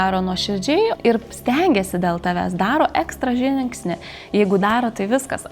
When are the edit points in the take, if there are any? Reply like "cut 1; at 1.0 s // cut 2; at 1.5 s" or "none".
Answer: cut 1; at 0.9 s